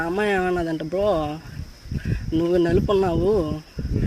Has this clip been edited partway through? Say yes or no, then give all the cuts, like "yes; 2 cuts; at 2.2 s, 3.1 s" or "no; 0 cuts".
no; 0 cuts